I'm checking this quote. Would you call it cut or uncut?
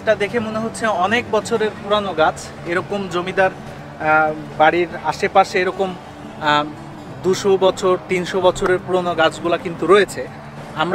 uncut